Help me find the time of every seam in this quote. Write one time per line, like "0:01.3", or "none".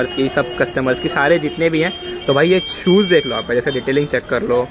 none